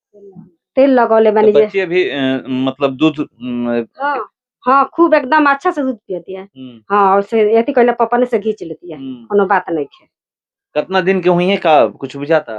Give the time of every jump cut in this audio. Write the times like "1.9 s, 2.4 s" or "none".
none